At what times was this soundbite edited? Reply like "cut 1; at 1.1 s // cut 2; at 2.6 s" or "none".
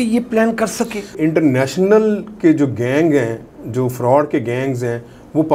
cut 1; at 1.1 s